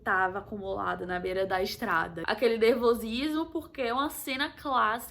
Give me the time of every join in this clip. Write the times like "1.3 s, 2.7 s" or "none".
2.1 s